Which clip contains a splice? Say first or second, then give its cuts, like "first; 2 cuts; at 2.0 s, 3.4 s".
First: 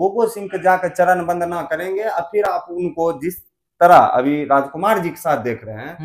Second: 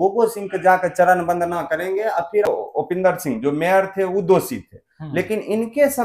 second; 1 cut; at 2.5 s